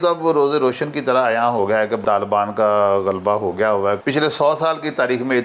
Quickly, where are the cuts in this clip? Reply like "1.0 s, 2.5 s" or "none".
2.0 s, 4.0 s